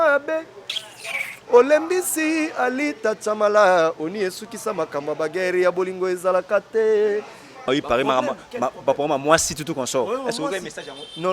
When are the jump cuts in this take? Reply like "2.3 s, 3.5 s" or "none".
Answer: 7.6 s

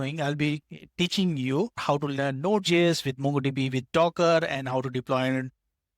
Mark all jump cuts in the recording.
1.8 s

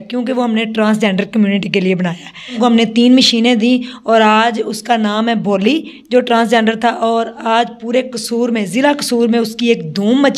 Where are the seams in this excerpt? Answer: 2.5 s

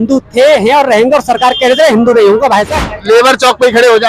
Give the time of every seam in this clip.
2.8 s

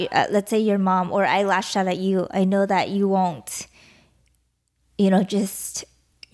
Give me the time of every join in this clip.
none

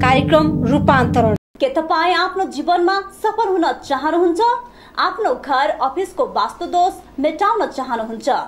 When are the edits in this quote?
1.5 s

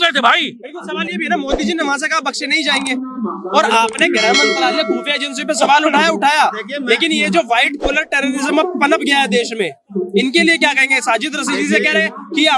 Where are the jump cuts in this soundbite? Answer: none

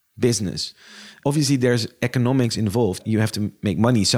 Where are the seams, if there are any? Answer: 1.1 s, 3.0 s

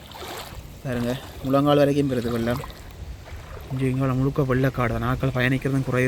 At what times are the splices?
none

